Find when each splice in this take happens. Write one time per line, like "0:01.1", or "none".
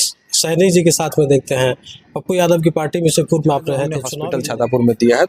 0:04.1

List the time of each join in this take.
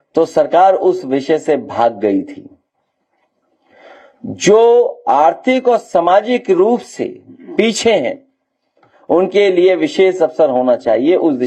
none

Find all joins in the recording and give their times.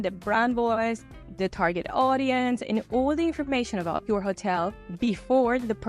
0:04.0

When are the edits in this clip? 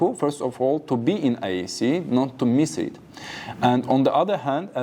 none

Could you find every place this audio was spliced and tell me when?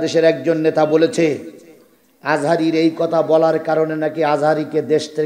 none

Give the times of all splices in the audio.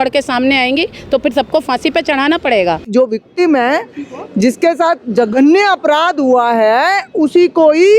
0:02.9

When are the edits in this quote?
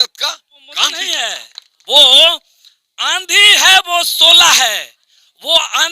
0:01.2

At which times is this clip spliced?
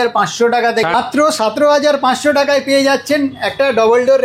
0:00.9

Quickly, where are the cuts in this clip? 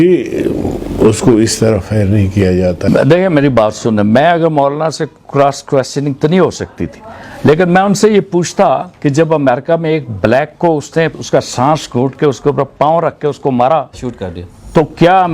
0:02.8

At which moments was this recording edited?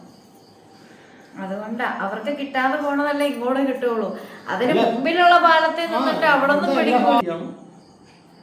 0:07.2

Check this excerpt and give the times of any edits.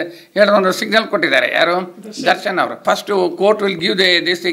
0:02.8

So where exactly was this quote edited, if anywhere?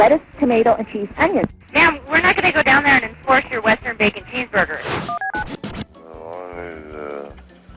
0:01.6
0:04.8
0:06.0

